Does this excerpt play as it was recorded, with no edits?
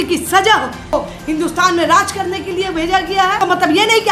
no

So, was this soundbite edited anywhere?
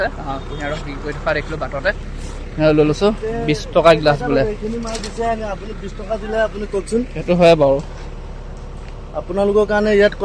no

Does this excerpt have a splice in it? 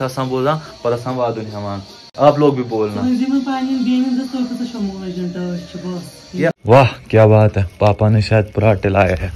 yes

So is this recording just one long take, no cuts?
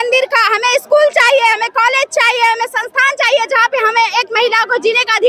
yes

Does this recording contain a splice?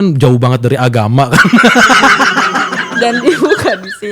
no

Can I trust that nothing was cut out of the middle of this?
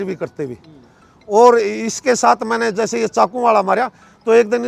yes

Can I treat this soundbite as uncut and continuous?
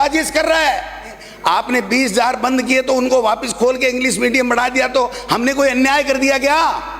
no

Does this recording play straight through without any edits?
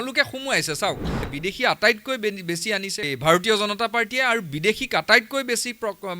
no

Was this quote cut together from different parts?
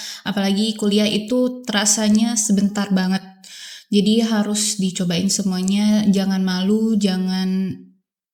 no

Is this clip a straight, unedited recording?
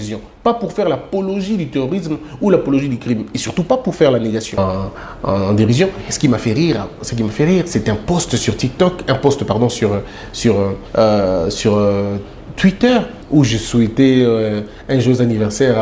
no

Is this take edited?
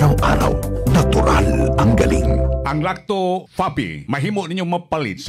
yes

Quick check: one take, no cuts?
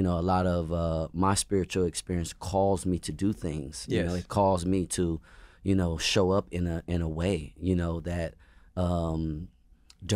yes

